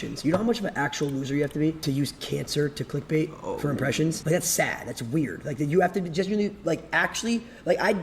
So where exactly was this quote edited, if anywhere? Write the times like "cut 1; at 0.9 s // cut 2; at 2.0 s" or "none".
cut 1; at 1.8 s // cut 2; at 4.2 s // cut 3; at 5.5 s